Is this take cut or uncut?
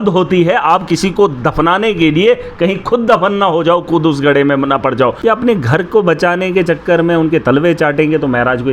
cut